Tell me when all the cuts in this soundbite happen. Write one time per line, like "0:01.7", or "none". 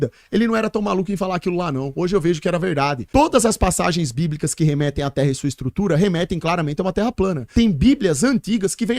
0:03.0
0:07.4